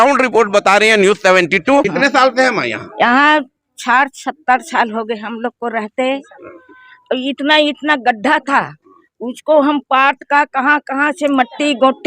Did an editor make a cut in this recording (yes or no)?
yes